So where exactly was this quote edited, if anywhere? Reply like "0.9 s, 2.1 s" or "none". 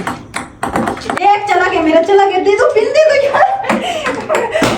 1.2 s